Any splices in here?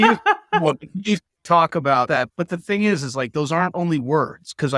yes; 1 cut; at 2.1 s

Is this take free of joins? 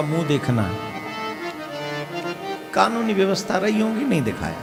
yes; 0 cuts

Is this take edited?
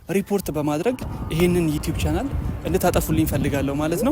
no; 0 cuts

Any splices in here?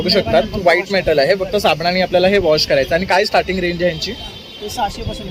no; 0 cuts

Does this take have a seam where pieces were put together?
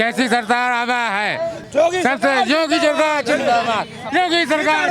yes; 1 cut; at 1.6 s

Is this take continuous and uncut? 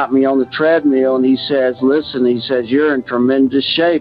yes; 0 cuts

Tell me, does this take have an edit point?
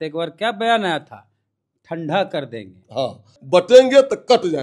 yes; 1 cut; at 3.4 s

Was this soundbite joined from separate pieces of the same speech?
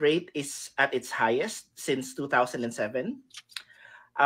no; 0 cuts

